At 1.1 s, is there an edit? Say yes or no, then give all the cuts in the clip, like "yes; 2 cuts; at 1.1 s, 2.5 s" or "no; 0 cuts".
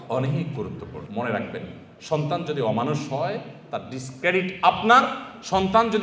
yes; 1 cut; at 1.1 s